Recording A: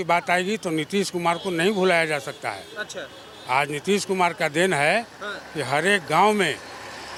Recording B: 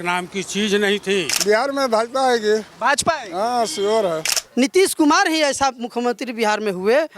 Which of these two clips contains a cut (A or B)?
B